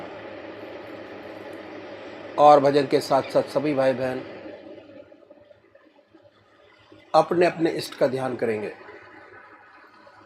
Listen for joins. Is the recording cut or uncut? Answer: uncut